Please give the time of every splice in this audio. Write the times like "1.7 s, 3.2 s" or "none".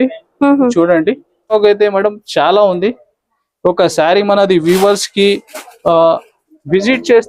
1.5 s